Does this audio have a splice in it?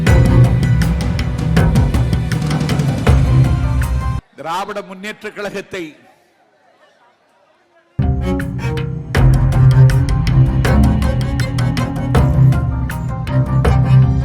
yes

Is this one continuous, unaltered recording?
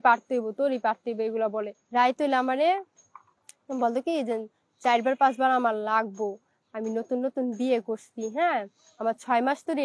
no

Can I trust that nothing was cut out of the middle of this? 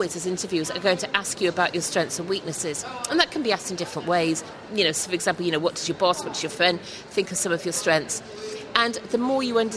yes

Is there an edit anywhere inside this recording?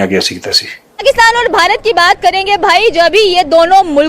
yes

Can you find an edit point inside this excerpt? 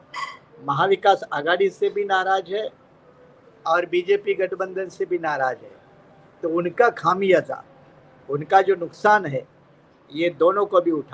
no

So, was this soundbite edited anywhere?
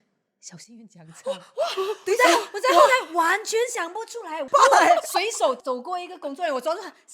yes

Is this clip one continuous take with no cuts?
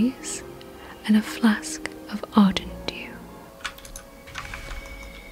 no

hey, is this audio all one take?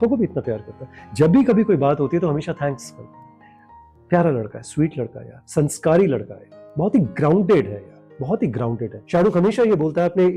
no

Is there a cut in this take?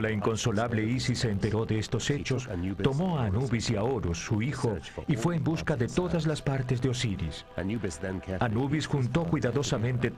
no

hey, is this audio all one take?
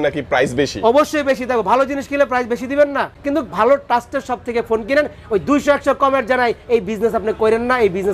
no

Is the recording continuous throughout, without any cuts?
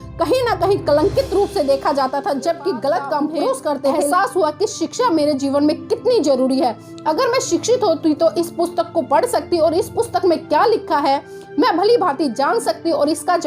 no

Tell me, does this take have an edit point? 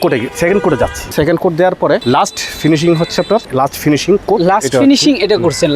yes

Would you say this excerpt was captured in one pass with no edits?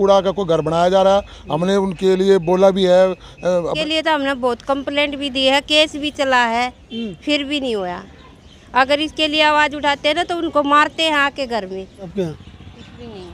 no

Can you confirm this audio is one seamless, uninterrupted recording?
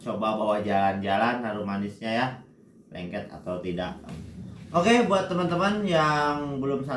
no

